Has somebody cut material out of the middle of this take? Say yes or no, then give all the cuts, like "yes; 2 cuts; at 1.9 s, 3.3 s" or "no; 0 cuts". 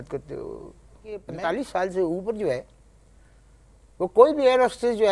yes; 1 cut; at 1.3 s